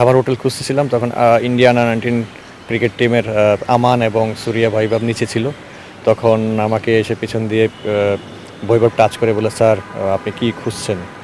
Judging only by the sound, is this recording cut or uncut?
uncut